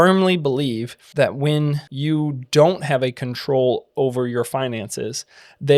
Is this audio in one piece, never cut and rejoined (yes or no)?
no